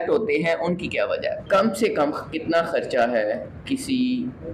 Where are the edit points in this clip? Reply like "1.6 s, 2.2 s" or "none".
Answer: 1.4 s